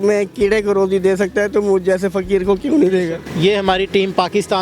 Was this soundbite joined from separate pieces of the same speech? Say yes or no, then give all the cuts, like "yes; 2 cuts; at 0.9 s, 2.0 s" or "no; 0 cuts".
yes; 1 cut; at 3.3 s